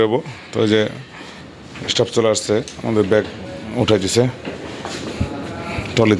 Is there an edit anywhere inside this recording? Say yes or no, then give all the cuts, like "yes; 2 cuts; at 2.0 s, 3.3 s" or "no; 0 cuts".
no; 0 cuts